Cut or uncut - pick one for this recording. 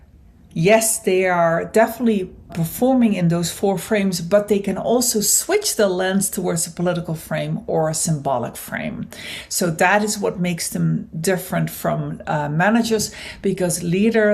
cut